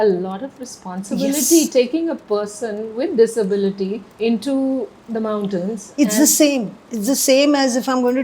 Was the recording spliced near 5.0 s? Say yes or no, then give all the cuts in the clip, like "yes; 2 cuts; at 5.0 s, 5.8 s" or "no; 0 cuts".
yes; 2 cuts; at 4.0 s, 5.0 s